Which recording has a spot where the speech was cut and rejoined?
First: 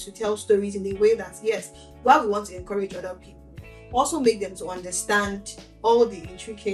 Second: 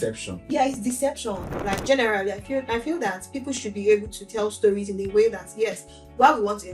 second; 1 cut; at 1.5 s

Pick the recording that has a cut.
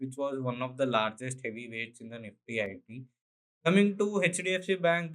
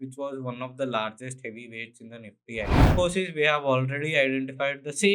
second; 1 cut; at 2.7 s

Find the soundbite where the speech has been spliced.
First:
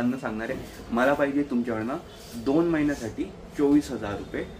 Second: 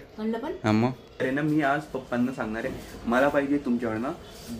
second; 1 cut; at 1.2 s

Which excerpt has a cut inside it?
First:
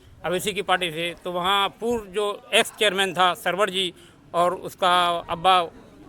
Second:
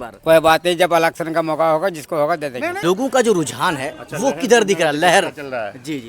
second; 1 cut; at 2.8 s

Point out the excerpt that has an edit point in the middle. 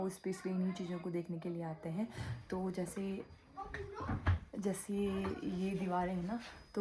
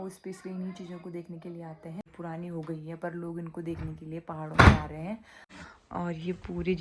second; 2 cuts; at 2.1 s, 5.6 s

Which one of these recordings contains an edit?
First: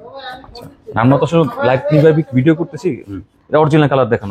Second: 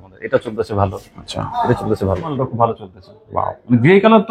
second; 1 cut; at 2.5 s

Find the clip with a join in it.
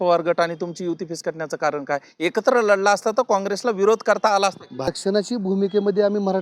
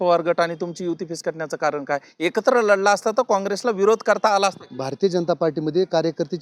first; 1 cut; at 4.9 s

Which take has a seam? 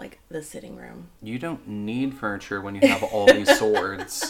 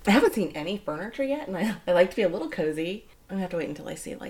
second; 1 cut; at 3.1 s

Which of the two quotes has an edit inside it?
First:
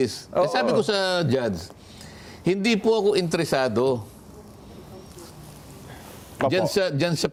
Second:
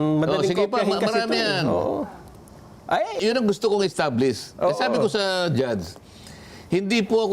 second; 1 cut; at 3.2 s

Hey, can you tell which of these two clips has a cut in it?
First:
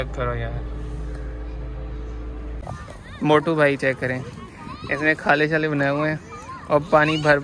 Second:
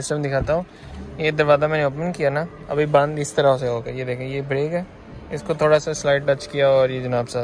first; 1 cut; at 2.6 s

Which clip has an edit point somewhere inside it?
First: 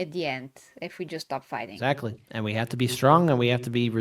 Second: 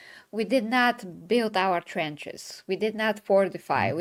first; 1 cut; at 1.7 s

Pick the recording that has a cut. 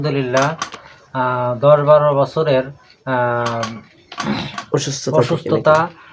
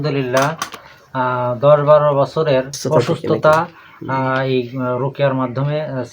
second; 1 cut; at 2.8 s

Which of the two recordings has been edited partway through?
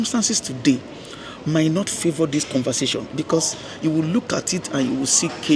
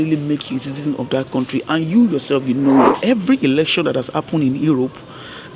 second; 1 cut; at 3.0 s

